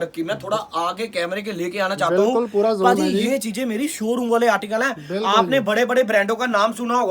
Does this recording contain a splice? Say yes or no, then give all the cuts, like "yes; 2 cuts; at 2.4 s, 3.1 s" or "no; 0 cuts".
no; 0 cuts